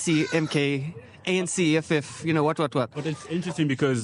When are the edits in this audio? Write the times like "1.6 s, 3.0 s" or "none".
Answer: none

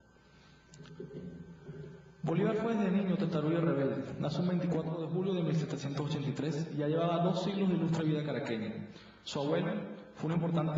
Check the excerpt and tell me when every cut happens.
6.0 s

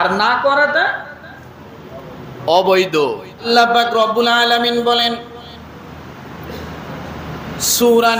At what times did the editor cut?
3.5 s

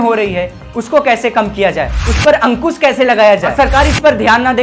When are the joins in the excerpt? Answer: 2.0 s, 3.5 s

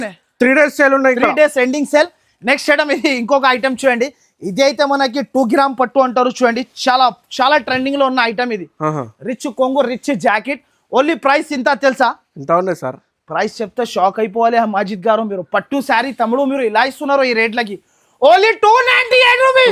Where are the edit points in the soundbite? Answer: none

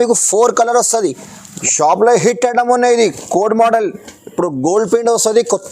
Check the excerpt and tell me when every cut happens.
1.4 s

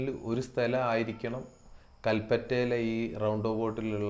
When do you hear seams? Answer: none

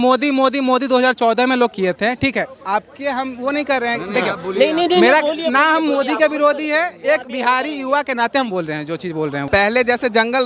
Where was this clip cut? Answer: 9.4 s

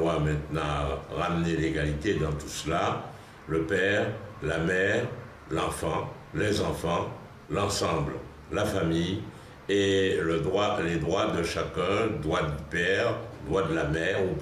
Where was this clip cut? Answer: none

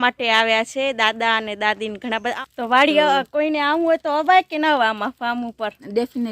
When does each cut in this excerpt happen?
2.3 s

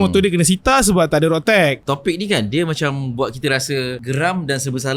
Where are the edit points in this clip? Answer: 1.8 s, 4.0 s

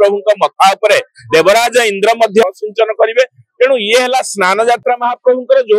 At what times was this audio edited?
2.4 s

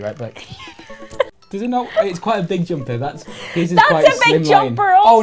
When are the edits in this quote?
1.3 s

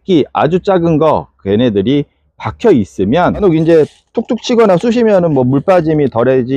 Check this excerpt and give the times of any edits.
3.4 s

